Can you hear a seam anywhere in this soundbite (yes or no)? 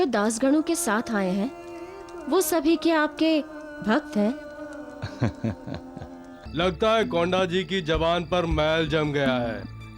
yes